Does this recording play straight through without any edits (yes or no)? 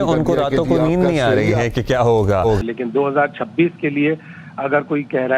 yes